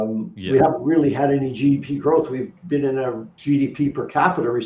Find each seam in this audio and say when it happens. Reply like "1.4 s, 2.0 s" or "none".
none